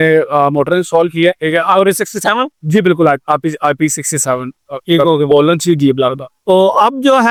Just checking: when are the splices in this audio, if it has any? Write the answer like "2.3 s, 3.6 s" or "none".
none